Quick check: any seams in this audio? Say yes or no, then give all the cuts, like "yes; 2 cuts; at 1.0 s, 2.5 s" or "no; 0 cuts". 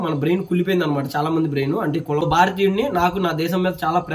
yes; 1 cut; at 2.2 s